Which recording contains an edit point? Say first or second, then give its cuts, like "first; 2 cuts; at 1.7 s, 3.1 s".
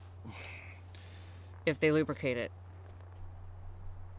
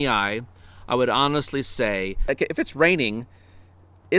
second; 1 cut; at 2.2 s